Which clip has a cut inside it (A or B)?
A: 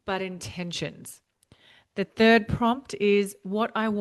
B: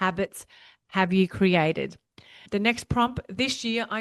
B